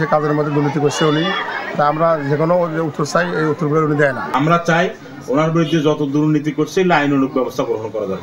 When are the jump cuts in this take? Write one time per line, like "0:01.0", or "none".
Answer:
0:04.2